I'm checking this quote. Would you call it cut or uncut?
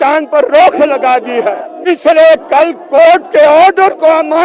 cut